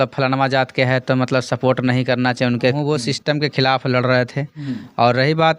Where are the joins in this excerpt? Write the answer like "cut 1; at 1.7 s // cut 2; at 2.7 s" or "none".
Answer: cut 1; at 2.8 s